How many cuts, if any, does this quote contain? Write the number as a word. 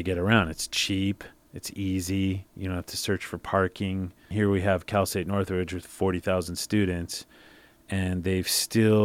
one